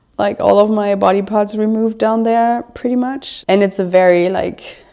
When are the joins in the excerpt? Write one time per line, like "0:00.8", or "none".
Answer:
none